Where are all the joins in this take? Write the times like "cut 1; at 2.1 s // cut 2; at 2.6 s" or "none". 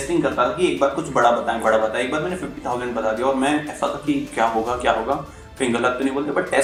none